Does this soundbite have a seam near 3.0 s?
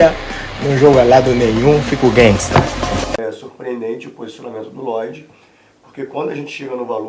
yes; 1 cut; at 3.0 s

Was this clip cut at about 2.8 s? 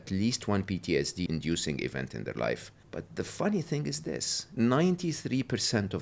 yes; 3 cuts; at 1.3 s, 2.8 s, 4.4 s

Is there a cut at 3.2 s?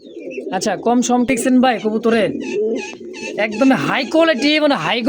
no; 1 cut; at 1.3 s

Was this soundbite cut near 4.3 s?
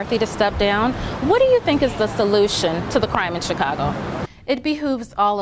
yes; 1 cut; at 4.3 s

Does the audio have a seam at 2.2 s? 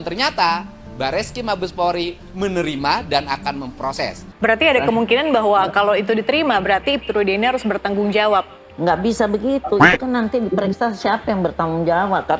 no; 1 cut; at 4.2 s

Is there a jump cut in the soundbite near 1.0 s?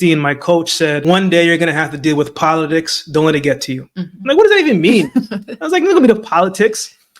yes; 1 cut; at 1.0 s

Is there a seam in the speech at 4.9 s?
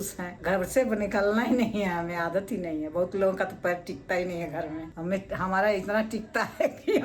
yes; 1 cut; at 4.9 s

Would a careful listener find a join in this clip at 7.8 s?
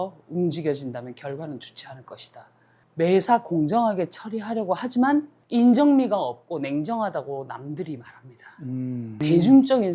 no; 2 cuts; at 2.7 s, 9.2 s

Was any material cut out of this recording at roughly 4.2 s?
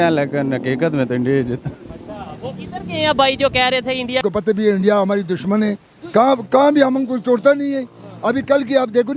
yes; 1 cut; at 4.2 s

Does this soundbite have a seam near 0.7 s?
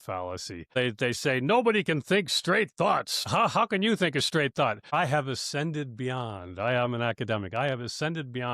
yes; 3 cuts; at 0.7 s, 3.2 s, 4.8 s

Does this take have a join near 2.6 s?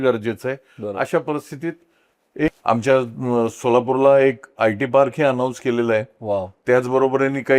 yes; 1 cut; at 2.6 s

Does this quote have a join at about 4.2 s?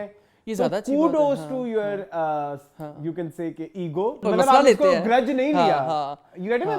yes; 1 cut; at 4.2 s

